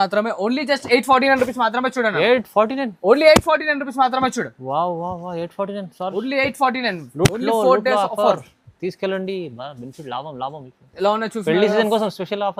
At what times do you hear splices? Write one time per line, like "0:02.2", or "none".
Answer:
none